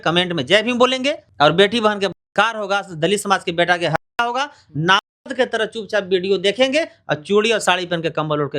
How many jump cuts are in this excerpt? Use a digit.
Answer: 1